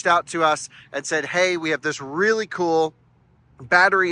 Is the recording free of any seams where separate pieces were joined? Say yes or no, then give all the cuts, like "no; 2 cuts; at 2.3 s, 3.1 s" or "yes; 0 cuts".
yes; 0 cuts